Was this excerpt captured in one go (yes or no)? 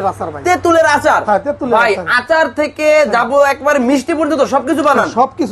yes